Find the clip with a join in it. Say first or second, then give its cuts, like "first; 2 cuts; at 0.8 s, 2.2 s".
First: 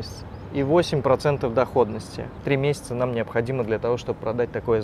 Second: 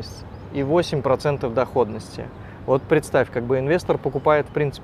first; 1 cut; at 2.3 s